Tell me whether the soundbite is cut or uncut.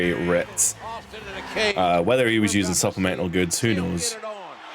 uncut